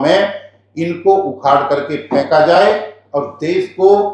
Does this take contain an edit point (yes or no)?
no